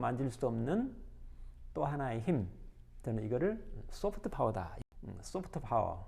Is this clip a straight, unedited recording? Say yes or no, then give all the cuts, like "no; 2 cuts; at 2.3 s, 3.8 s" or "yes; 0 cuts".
no; 1 cut; at 4.8 s